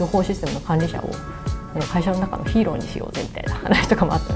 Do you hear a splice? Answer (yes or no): no